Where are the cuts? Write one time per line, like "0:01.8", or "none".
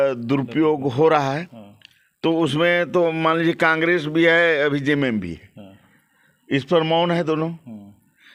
none